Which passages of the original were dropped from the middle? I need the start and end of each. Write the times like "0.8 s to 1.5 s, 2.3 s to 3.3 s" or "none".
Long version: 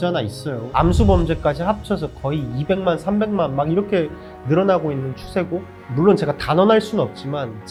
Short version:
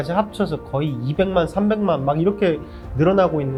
none